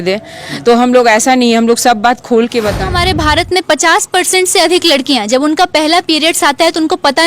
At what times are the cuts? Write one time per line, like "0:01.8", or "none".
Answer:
0:02.8